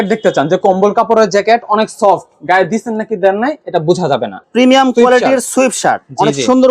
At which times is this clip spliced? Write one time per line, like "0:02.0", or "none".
0:04.4